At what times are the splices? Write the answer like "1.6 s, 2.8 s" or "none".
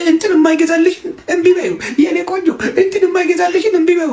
none